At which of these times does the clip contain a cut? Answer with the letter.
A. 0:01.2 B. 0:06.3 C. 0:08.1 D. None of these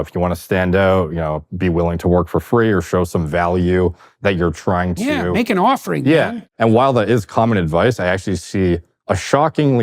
B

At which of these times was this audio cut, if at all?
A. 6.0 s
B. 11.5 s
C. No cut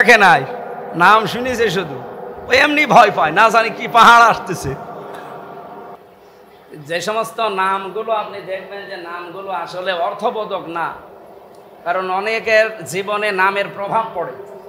A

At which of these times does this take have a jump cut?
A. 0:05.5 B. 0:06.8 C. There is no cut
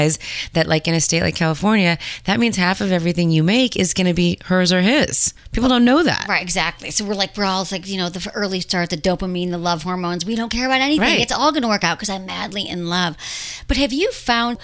C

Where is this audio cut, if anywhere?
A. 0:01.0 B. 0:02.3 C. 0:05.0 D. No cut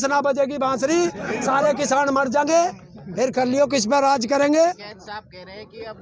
D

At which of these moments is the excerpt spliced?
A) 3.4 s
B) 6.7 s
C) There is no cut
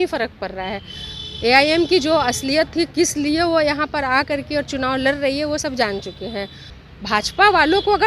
B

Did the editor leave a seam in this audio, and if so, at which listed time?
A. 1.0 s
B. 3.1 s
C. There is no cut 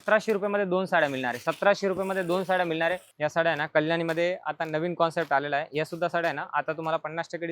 B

